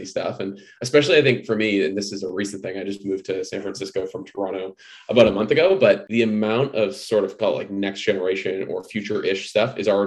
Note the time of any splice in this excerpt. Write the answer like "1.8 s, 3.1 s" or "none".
6.1 s